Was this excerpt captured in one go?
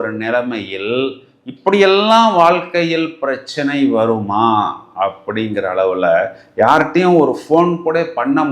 yes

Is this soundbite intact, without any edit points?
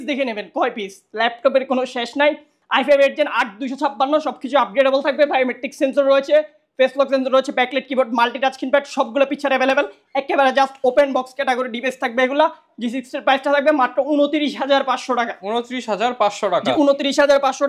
yes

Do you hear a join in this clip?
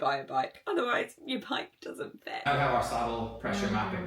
yes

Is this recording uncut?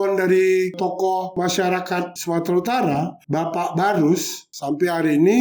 no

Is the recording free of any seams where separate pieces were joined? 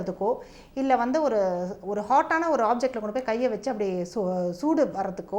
yes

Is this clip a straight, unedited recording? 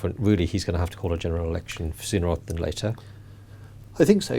yes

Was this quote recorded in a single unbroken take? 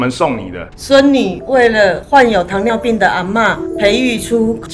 yes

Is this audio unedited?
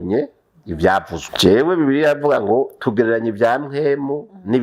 no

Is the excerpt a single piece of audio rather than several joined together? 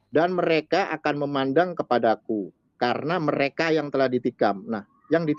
yes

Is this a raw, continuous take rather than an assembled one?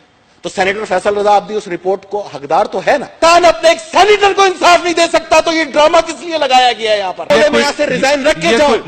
no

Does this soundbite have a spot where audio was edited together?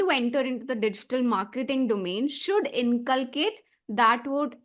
no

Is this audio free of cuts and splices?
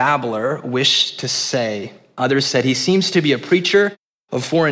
no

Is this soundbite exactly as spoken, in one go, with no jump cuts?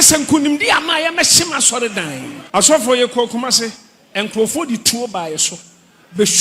no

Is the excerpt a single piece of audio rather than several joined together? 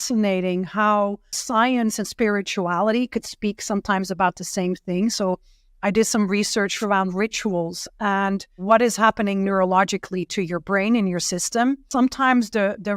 no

